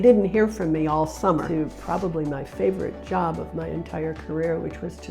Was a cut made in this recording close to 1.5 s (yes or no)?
yes